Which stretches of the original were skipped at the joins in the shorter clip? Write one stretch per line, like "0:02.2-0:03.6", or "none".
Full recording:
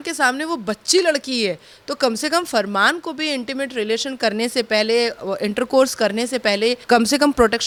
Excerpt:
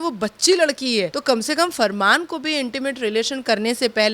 0:01.6-0:01.9

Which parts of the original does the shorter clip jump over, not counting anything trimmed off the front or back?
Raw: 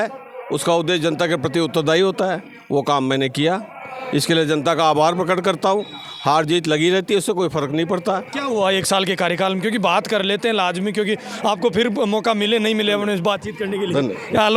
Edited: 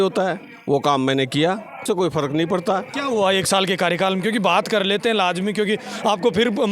0:03.9-0:07.2

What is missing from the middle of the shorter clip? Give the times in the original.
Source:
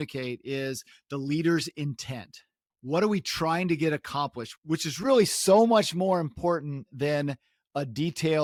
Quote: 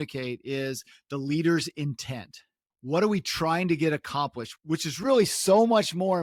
none

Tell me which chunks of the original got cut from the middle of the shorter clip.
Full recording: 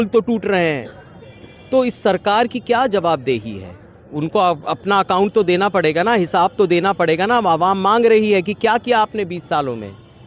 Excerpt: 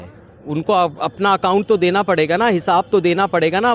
none

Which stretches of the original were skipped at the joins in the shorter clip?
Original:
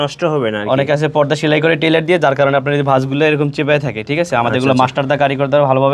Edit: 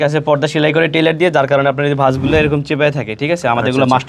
none

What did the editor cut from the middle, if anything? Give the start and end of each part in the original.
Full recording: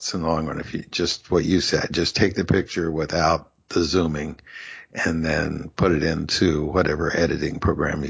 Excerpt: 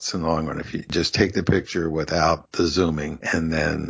0:00.9-0:01.9
0:03.6-0:04.3

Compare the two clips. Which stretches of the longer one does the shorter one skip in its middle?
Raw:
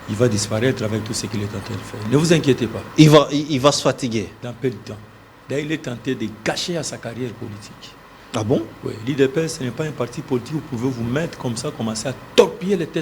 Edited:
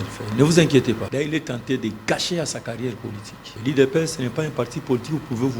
0:02.8-0:05.4
0:07.9-0:09.0

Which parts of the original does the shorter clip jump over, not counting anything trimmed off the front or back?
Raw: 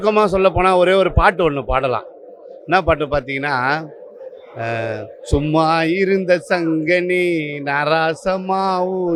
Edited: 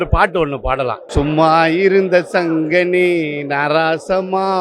0:02.1-0:05.2

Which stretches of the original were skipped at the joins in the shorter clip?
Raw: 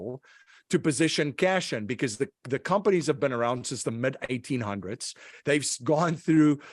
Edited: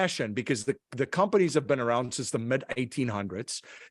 none

